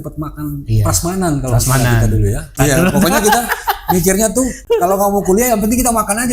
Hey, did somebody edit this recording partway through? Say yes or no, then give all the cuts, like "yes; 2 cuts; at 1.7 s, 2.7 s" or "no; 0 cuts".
yes; 2 cuts; at 2.5 s, 4.6 s